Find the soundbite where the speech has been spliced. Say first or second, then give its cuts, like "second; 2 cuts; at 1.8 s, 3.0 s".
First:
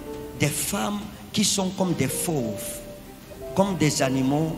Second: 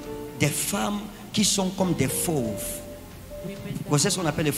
first; 1 cut; at 3.3 s